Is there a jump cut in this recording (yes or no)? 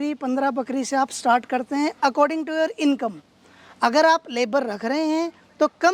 no